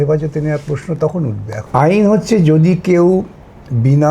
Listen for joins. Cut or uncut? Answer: cut